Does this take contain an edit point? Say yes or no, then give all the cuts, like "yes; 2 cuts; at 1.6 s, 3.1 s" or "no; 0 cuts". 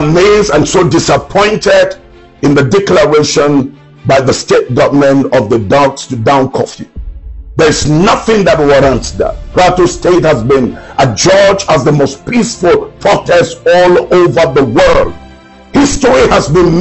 no; 0 cuts